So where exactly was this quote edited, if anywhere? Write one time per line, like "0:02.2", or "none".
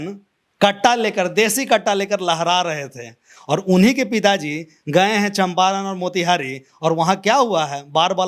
none